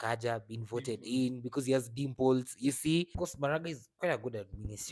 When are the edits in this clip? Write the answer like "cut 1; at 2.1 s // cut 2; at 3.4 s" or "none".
cut 1; at 3.1 s